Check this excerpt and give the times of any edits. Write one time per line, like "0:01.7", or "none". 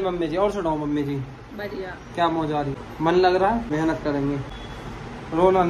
0:02.8
0:03.7
0:04.5